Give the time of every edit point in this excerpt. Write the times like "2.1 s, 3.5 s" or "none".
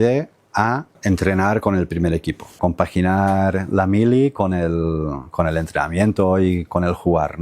1.0 s, 2.6 s